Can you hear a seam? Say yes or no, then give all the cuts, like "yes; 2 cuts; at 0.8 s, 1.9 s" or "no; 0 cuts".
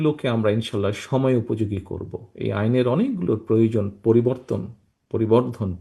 no; 0 cuts